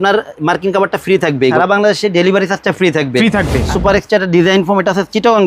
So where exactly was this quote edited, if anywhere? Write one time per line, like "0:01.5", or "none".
0:01.5
0:03.7